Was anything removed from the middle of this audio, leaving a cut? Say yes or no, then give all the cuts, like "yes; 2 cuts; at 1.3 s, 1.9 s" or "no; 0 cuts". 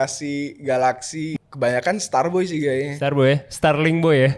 yes; 1 cut; at 1.3 s